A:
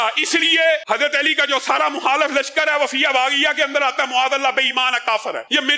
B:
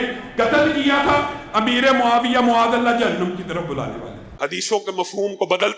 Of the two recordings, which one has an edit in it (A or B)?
B